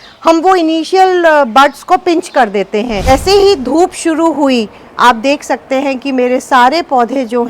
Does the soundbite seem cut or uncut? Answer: cut